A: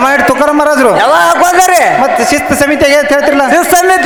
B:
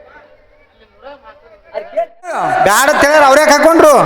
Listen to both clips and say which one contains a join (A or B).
B